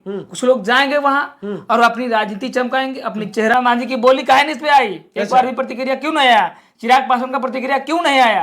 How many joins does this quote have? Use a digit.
1